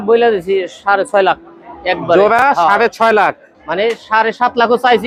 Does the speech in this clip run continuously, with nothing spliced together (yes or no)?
yes